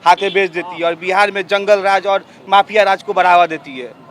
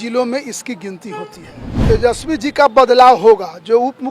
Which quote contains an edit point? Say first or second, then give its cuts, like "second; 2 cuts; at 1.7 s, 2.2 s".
second; 1 cut; at 1.7 s